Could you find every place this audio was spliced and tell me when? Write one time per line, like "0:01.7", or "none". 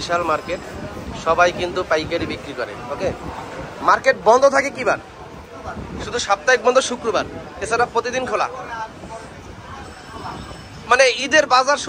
none